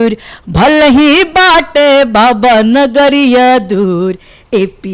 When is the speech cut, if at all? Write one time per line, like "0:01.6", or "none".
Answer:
none